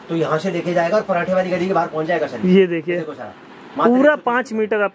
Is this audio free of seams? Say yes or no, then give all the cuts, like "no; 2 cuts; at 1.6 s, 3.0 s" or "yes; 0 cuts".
yes; 0 cuts